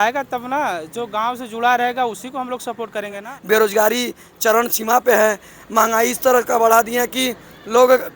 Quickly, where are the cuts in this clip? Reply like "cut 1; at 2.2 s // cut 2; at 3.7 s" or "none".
cut 1; at 3.3 s